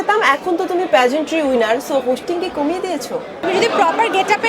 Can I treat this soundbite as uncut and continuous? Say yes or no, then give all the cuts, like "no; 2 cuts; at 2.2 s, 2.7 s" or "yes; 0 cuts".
no; 1 cut; at 3.4 s